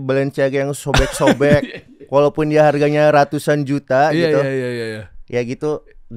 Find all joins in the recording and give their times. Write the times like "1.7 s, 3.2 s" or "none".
none